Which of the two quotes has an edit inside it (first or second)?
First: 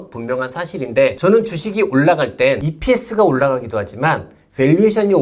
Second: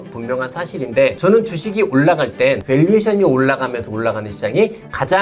second